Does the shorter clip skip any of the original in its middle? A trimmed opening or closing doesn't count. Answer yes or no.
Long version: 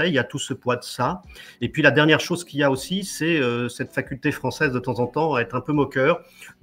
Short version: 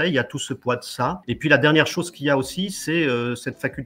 yes